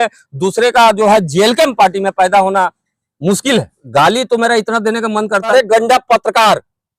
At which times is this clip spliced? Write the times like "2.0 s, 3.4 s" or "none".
3.8 s, 5.5 s